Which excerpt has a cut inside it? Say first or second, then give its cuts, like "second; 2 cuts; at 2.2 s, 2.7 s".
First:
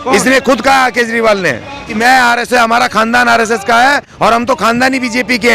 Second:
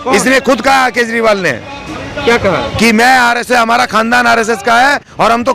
first; 1 cut; at 2.0 s